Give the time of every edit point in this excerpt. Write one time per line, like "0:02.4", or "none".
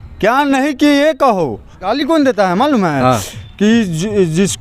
0:01.9